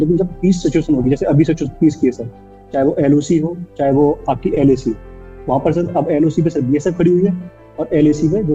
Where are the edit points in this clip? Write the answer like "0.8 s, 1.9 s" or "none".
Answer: none